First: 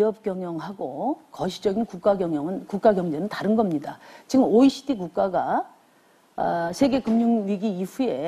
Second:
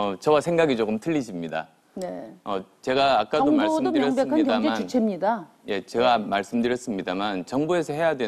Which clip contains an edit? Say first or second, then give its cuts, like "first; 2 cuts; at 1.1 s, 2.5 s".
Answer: first; 1 cut; at 5.3 s